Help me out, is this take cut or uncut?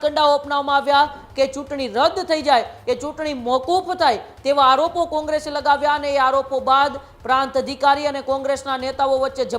uncut